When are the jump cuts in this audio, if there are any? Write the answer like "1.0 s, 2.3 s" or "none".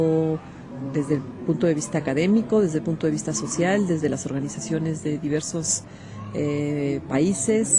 none